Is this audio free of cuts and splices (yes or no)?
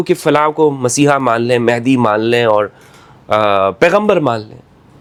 yes